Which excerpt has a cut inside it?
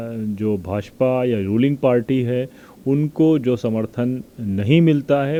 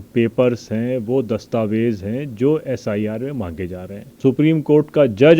second; 1 cut; at 4.1 s

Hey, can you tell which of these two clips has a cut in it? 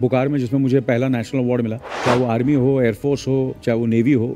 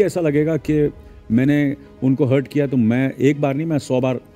first; 2 cuts; at 1.9 s, 3.6 s

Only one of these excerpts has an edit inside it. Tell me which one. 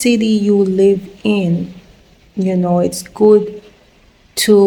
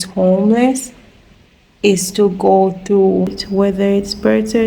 second; 1 cut; at 3.4 s

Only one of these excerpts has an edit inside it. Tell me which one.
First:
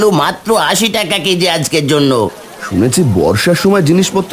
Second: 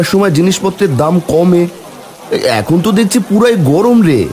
first; 1 cut; at 2.4 s

